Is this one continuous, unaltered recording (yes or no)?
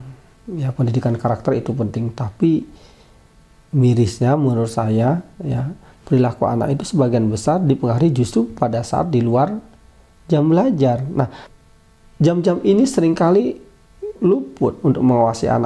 no